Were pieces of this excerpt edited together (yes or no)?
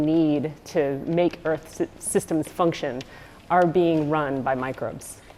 no